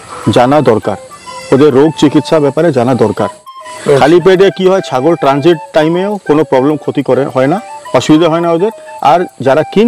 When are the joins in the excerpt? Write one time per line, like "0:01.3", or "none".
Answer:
0:03.4